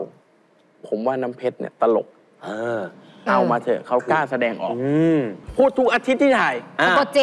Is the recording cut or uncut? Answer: cut